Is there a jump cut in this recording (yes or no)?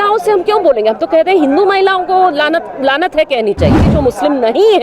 yes